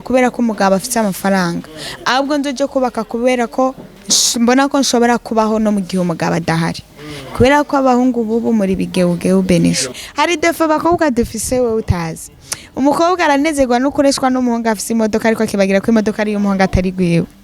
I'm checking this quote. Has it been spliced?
yes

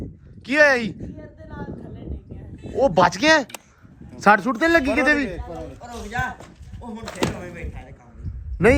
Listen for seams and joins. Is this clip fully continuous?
yes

